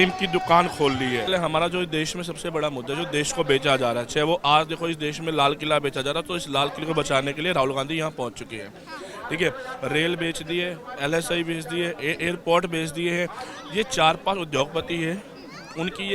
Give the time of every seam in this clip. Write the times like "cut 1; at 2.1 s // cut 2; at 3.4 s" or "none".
cut 1; at 1.3 s